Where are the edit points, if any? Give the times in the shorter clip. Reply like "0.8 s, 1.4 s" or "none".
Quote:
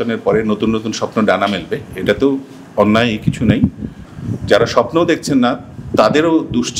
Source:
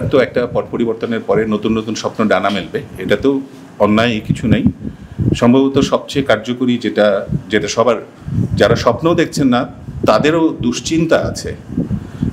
4.1 s